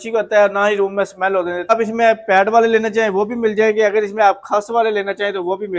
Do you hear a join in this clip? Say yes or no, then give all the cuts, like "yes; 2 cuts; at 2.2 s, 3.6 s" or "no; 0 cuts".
yes; 1 cut; at 1.7 s